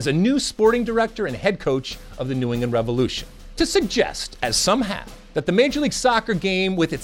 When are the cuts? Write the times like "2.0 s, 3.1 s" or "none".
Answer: 3.6 s, 5.2 s

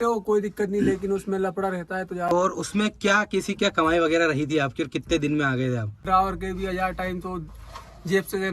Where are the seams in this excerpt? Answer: 2.3 s, 6.0 s

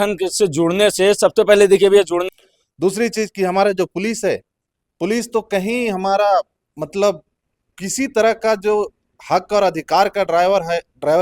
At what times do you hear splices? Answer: 2.3 s

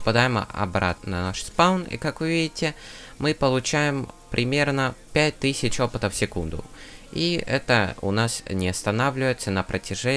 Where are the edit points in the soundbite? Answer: 1.0 s

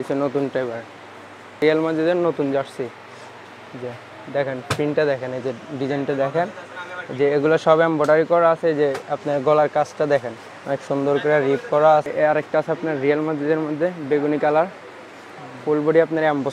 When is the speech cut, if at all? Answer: 1.6 s, 12.1 s

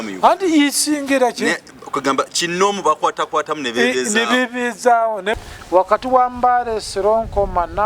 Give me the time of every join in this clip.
5.3 s

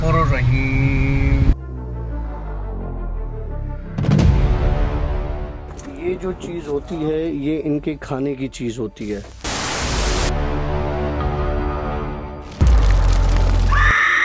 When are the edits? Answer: none

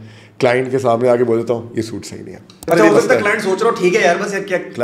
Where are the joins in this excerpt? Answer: 2.7 s

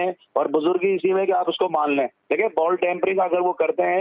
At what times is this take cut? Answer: 2.2 s

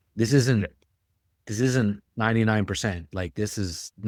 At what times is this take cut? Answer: none

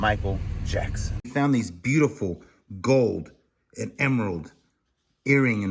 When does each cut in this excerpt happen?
1.3 s

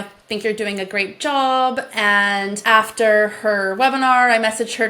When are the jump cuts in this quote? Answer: 2.6 s

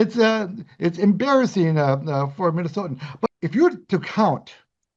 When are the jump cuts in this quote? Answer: 3.3 s

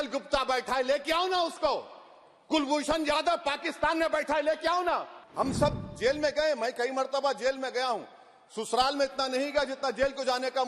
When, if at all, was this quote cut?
5.2 s

